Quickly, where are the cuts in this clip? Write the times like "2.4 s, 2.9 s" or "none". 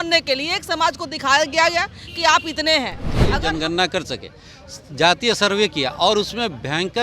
3.3 s